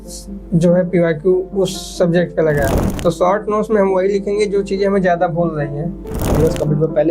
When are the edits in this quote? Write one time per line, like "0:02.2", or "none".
0:02.8
0:06.3